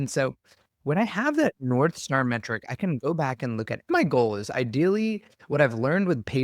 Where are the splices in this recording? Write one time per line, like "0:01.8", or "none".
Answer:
0:03.9